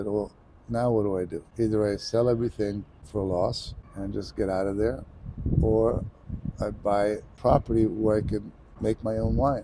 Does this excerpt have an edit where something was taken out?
no; 0 cuts

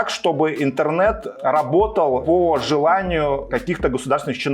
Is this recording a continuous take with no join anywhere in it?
no; 3 cuts; at 1.3 s, 2.2 s, 3.5 s

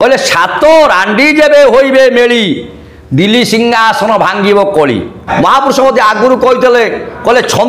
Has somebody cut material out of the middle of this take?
yes; 1 cut; at 5.2 s

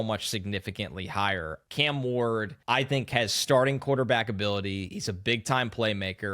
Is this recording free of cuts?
no; 2 cuts; at 1.6 s, 2.5 s

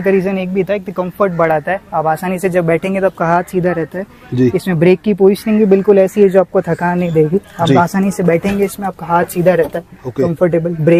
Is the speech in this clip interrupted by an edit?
no; 0 cuts

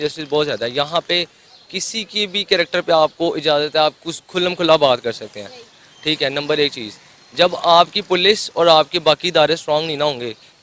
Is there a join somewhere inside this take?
no; 0 cuts

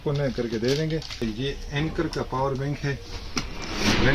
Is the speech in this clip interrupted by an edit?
yes; 1 cut; at 1.2 s

